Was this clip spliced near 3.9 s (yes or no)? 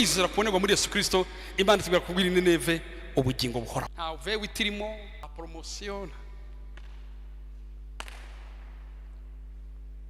yes